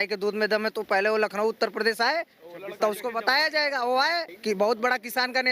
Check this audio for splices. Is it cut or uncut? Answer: cut